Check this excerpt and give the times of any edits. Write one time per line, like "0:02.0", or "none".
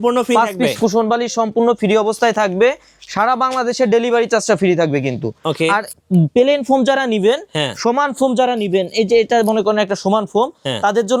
none